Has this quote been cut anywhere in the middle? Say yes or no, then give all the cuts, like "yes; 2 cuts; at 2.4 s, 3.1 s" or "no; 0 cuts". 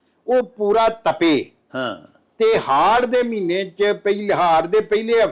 no; 0 cuts